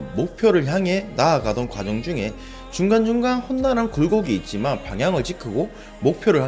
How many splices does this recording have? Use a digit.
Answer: 0